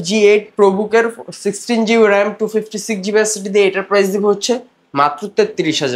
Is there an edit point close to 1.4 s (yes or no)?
no